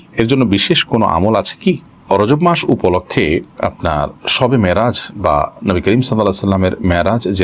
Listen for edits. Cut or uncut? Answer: uncut